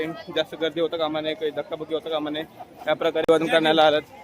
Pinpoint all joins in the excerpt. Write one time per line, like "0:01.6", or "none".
0:03.2